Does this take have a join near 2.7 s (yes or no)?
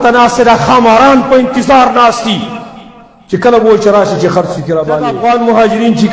no